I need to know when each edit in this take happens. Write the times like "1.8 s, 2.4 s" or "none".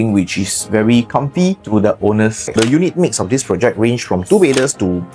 2.5 s